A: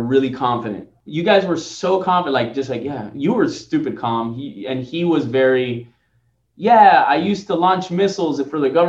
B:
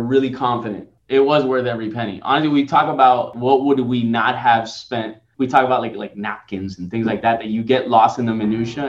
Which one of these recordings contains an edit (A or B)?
B